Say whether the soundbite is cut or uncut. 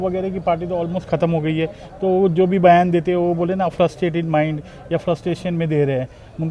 uncut